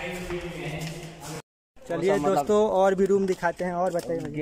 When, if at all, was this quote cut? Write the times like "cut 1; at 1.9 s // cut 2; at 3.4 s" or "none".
cut 1; at 1.4 s